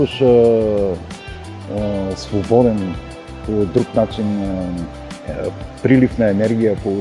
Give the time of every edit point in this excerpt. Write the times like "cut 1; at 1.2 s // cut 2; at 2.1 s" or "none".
none